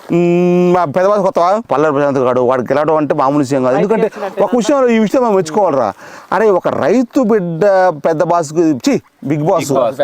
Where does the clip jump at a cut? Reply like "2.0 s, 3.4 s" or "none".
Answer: 1.7 s

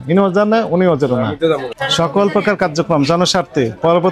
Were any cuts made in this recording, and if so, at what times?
1.7 s

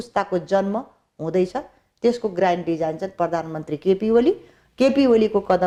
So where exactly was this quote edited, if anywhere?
none

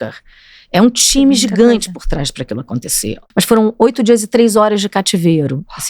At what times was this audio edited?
3.2 s

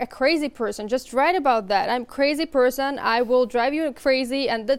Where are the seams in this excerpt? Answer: none

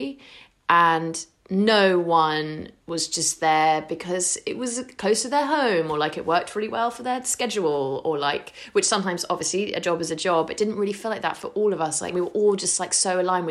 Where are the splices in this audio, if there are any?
12.1 s

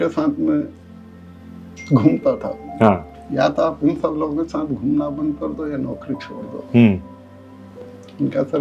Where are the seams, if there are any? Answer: 3.2 s

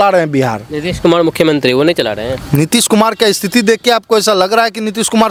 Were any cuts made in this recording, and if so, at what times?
none

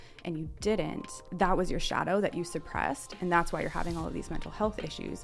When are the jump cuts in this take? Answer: 1.2 s

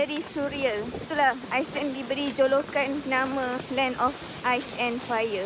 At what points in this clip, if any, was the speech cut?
1.0 s, 3.2 s

